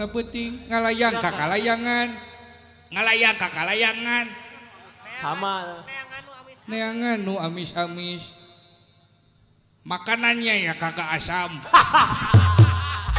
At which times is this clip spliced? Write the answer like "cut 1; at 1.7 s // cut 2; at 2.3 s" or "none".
none